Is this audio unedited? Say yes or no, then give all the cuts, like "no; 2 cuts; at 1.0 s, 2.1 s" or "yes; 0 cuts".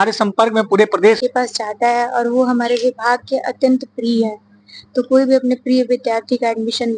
no; 1 cut; at 1.2 s